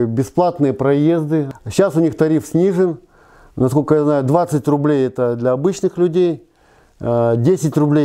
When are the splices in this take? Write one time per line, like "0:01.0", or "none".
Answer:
0:01.5